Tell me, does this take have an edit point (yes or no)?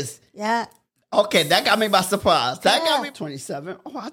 yes